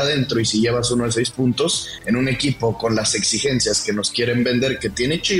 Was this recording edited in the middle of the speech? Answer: no; 0 cuts

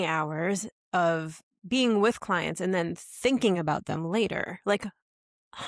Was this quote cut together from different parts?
no; 0 cuts

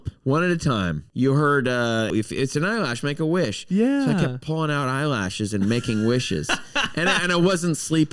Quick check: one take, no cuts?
no; 2 cuts; at 1.0 s, 2.1 s

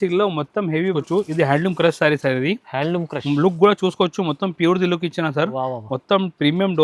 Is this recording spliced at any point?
yes; 1 cut; at 1.0 s

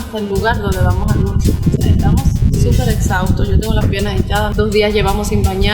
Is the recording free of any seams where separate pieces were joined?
no; 1 cut; at 4.5 s

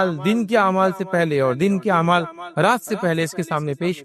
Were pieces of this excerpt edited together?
no; 0 cuts

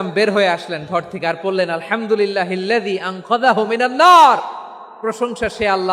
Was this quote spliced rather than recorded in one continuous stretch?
no; 0 cuts

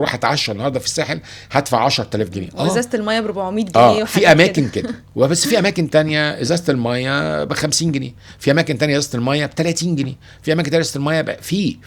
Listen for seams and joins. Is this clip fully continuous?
yes; 0 cuts

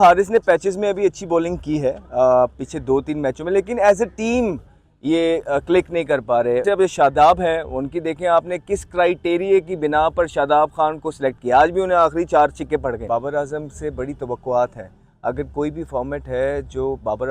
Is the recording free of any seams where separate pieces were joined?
no; 2 cuts; at 6.6 s, 13.0 s

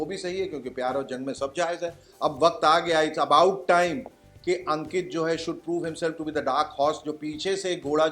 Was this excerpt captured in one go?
no; 1 cut; at 2.1 s

